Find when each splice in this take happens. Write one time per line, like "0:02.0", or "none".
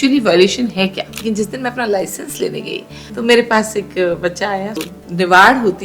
0:01.1
0:04.9